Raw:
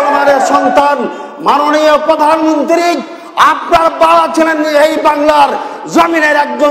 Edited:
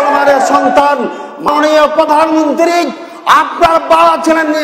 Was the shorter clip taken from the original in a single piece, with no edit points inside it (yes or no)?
no